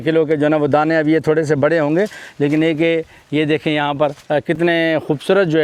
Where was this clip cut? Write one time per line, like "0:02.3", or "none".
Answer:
none